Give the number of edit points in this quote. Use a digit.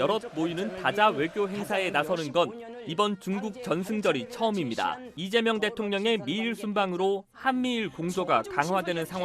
1